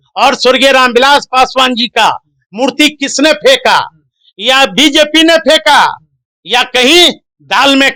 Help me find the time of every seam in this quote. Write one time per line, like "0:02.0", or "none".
none